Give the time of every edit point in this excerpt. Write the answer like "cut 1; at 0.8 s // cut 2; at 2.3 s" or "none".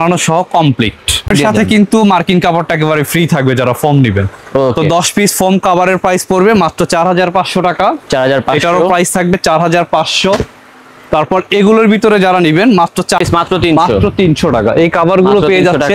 cut 1; at 1.3 s // cut 2; at 13.2 s